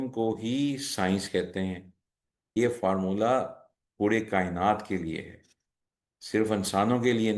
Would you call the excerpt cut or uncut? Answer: cut